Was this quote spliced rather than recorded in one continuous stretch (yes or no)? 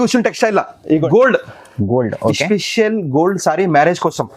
yes